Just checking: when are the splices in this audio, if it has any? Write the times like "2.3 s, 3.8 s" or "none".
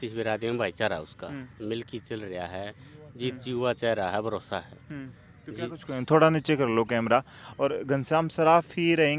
none